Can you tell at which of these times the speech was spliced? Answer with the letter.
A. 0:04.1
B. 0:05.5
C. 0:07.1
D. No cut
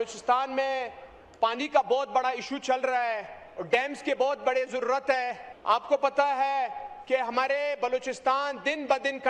B